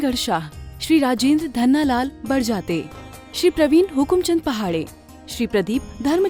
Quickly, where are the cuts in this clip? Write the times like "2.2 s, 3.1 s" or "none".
none